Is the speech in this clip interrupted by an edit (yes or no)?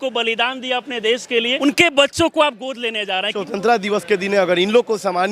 yes